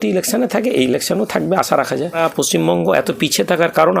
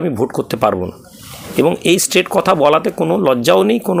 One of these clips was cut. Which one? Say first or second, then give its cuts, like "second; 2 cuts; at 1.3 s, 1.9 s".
first; 1 cut; at 2.2 s